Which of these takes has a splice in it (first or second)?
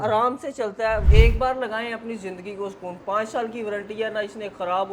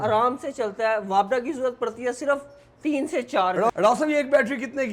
first